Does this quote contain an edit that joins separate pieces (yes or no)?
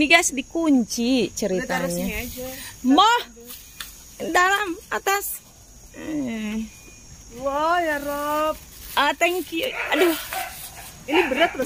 no